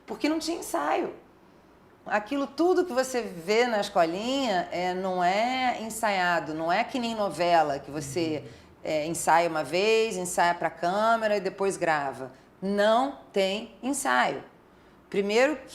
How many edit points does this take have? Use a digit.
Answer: 1